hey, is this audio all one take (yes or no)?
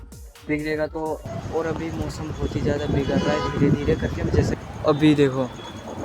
no